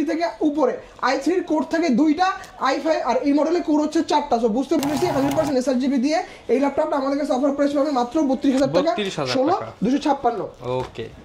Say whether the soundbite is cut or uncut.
cut